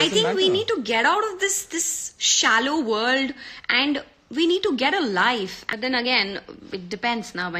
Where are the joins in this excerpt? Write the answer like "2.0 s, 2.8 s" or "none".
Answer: 5.6 s